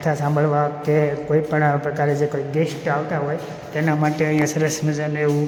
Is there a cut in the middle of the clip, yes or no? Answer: no